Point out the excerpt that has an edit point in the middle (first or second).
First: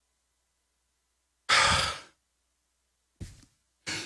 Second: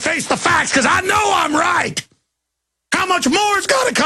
second